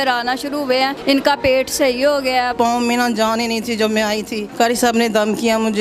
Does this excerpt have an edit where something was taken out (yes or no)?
yes